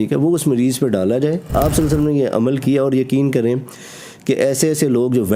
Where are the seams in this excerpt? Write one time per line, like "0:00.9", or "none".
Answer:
0:01.5